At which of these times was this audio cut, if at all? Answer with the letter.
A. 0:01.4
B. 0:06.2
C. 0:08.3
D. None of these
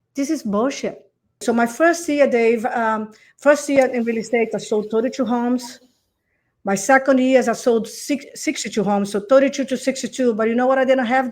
A